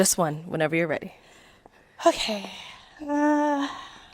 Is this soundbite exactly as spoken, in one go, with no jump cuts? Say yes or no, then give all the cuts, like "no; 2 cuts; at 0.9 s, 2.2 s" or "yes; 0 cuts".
yes; 0 cuts